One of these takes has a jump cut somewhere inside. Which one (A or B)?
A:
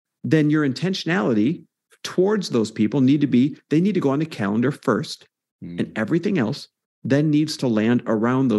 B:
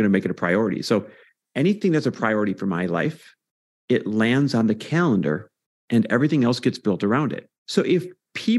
B